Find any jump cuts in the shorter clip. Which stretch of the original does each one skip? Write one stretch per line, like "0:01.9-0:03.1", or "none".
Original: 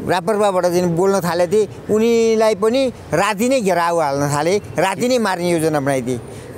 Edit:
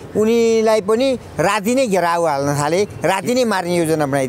none